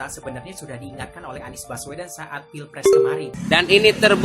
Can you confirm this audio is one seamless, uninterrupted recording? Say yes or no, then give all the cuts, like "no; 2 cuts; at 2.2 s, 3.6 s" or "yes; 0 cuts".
no; 1 cut; at 3.3 s